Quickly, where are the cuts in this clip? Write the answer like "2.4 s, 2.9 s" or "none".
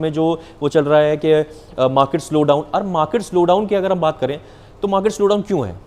none